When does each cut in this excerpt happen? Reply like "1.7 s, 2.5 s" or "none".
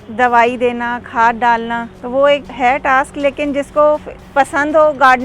2.0 s, 2.5 s, 4.2 s

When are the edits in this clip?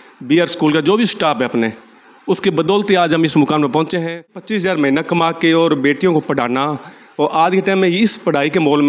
4.4 s

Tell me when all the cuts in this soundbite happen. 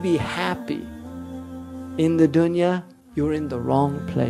2.9 s

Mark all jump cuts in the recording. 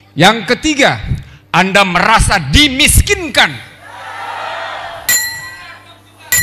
none

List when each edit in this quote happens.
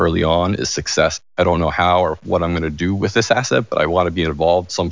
1.2 s

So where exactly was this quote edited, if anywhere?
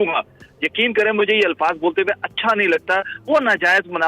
none

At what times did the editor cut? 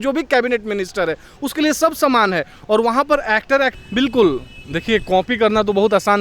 3.8 s

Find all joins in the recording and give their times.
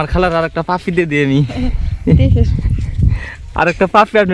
none

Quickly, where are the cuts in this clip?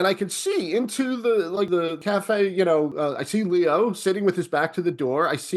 1.7 s, 2.9 s

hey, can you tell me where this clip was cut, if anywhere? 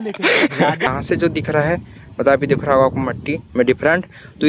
0.9 s

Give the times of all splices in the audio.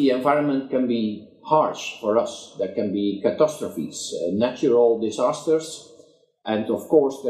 4.3 s

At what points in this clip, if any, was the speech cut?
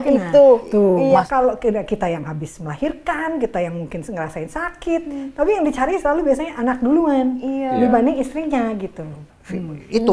1.3 s, 9.2 s

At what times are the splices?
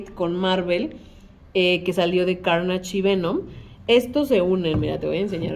none

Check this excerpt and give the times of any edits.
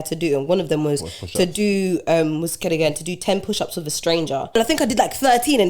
4.5 s

